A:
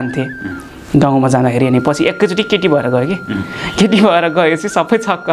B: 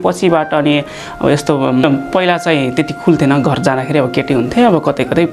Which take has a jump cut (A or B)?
B